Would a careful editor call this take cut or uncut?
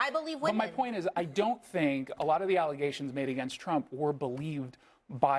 uncut